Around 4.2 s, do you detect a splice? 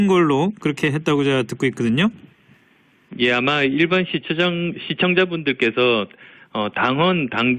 no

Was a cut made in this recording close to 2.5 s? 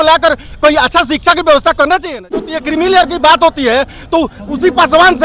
yes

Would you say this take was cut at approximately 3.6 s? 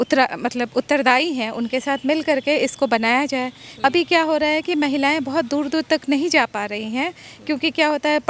yes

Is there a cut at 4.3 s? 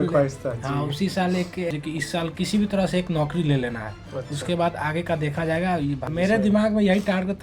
no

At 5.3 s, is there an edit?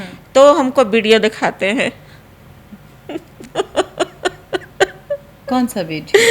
yes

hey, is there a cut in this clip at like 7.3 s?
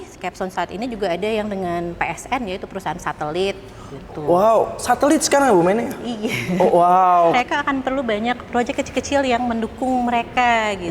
yes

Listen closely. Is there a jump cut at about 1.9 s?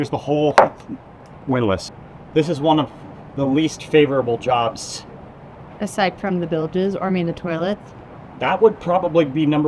yes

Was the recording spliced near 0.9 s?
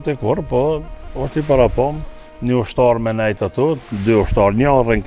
no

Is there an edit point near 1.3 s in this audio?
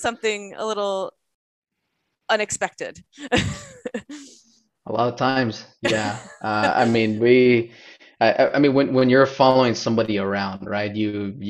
no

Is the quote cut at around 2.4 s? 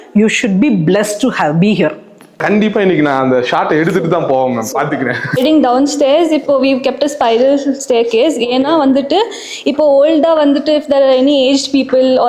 yes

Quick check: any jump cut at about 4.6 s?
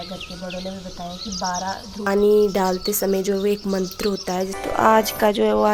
yes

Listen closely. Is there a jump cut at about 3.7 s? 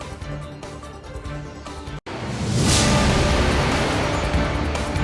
no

